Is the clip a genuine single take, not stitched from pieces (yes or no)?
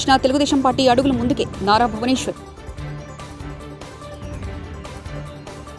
yes